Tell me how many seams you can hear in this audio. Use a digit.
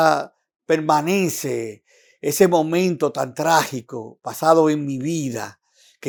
0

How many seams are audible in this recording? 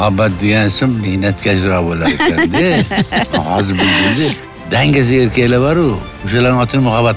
1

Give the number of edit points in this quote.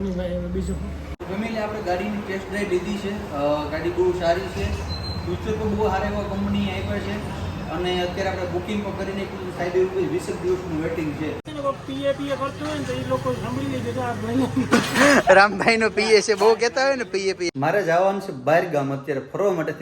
3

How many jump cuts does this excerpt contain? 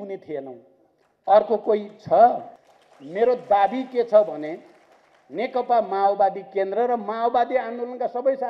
1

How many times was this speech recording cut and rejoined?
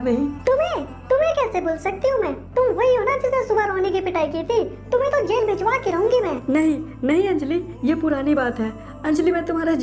1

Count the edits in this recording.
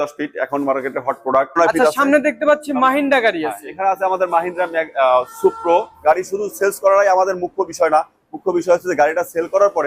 2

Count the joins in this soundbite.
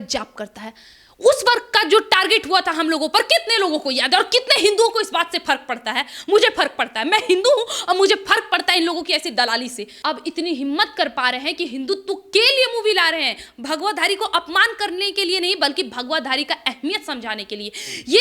1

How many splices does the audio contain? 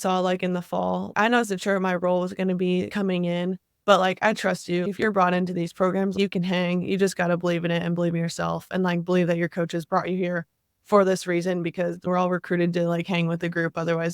5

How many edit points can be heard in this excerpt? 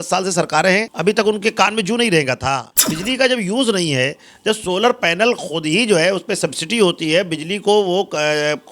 2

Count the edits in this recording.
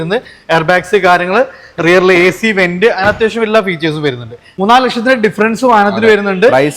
1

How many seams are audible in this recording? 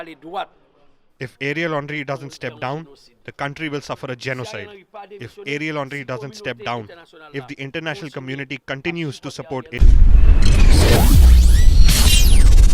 1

